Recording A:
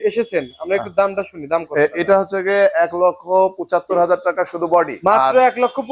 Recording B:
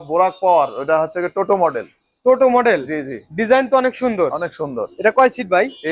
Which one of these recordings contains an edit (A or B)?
A